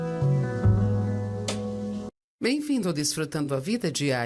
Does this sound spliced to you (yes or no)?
yes